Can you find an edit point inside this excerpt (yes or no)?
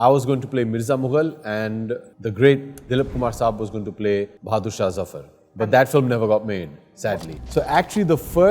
yes